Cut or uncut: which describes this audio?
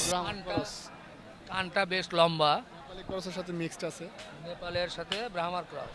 uncut